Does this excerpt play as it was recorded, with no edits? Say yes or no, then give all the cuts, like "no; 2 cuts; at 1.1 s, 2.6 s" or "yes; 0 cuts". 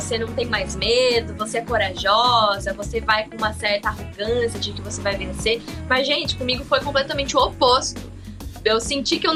yes; 0 cuts